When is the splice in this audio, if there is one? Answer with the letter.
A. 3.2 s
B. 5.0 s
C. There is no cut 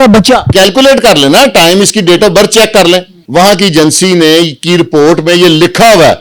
A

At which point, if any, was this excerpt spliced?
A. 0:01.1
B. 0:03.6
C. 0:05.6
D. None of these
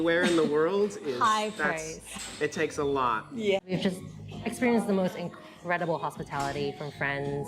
B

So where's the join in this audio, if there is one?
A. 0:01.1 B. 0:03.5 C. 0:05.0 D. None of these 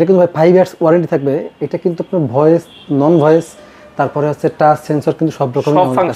D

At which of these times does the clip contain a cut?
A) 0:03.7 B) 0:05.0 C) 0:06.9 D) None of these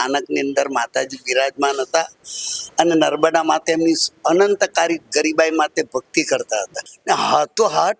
C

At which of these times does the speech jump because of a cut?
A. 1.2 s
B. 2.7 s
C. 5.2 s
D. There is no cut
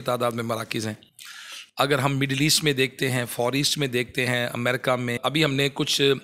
C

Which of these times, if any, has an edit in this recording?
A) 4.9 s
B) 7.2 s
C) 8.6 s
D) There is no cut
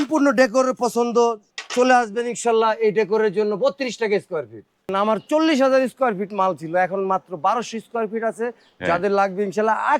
A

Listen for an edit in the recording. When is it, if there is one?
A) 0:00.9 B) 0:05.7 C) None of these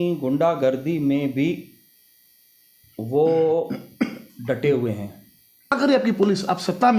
B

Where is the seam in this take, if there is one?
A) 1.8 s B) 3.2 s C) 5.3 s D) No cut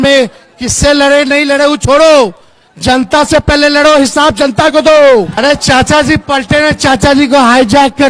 C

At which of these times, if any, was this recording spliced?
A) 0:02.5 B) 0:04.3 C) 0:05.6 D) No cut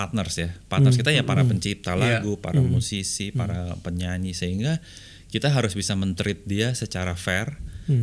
D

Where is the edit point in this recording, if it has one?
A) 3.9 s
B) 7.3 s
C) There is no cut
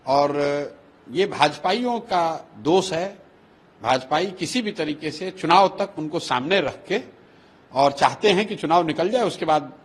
C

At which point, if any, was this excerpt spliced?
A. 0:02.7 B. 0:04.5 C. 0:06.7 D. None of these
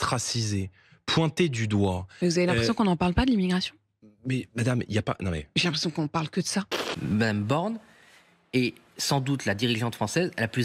C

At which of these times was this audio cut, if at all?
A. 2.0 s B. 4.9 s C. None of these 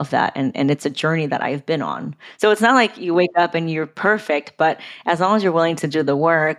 C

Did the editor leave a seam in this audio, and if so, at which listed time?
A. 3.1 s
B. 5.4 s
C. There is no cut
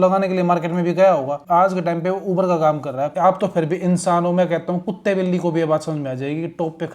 A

